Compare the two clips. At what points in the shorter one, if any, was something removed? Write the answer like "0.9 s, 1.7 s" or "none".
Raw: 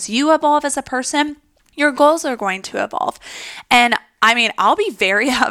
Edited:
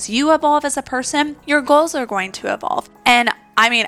1.4 s, 2.9 s